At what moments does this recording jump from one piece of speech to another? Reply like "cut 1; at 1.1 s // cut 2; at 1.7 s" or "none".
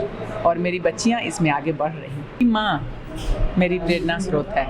cut 1; at 2.4 s